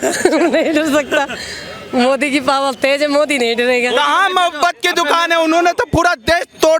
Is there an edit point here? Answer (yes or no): yes